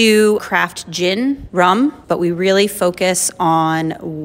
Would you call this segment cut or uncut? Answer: cut